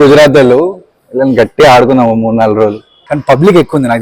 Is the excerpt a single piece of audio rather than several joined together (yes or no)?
no